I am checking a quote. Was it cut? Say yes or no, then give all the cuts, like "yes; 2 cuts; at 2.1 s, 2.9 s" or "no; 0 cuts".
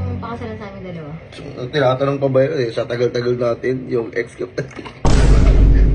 no; 0 cuts